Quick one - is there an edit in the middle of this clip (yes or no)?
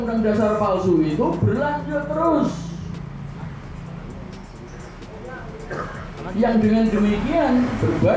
no